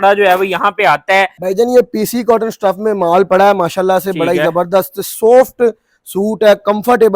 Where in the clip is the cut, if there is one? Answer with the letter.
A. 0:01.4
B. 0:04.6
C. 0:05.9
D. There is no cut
A